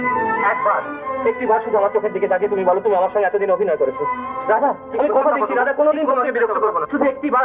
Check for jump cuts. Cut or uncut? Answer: uncut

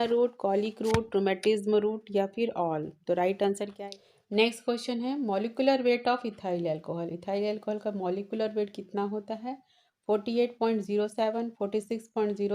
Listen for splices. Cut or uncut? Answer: cut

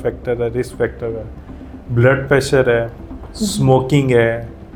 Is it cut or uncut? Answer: uncut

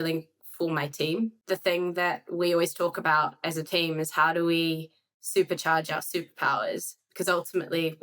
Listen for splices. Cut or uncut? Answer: cut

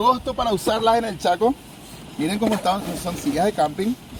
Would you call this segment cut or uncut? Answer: uncut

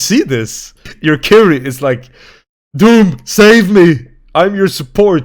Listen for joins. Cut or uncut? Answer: cut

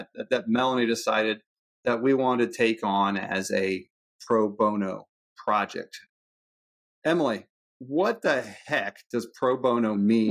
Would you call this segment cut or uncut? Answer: uncut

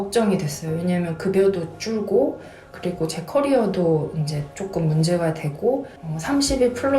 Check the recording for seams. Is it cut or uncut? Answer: cut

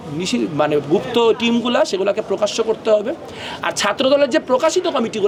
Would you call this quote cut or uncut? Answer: uncut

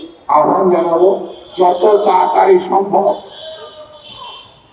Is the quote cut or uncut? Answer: uncut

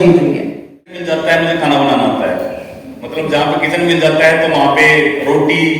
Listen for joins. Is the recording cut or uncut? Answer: cut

